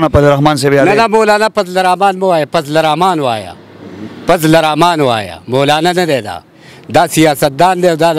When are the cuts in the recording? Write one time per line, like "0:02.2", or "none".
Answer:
none